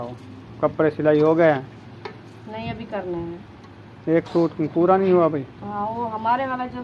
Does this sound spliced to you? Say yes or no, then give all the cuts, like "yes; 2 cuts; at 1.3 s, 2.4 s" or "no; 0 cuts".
no; 0 cuts